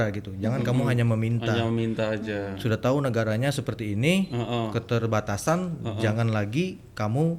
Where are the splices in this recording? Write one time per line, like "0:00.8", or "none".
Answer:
none